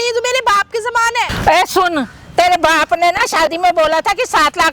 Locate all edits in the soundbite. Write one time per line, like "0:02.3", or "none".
0:01.3